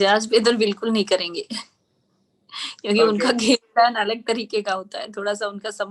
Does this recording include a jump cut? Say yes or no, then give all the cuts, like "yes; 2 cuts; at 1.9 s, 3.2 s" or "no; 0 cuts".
no; 0 cuts